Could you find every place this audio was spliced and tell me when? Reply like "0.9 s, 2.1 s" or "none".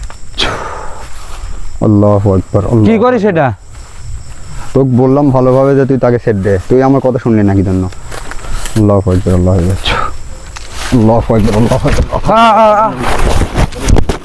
none

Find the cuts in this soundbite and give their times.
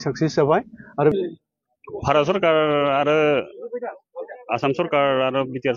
1.1 s

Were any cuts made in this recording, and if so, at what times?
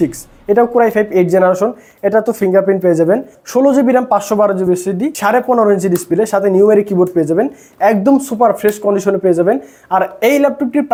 none

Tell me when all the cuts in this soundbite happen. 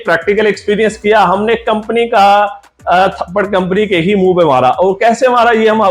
none

